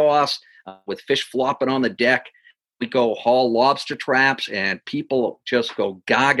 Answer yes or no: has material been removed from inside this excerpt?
no